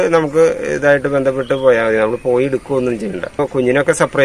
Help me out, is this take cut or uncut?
uncut